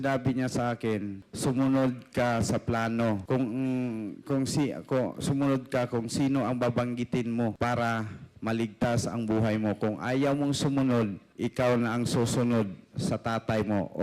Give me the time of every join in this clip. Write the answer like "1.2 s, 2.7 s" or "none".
1.2 s, 3.2 s, 7.5 s, 11.2 s